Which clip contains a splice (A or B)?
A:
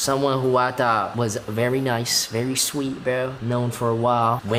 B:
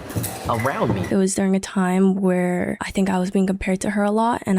B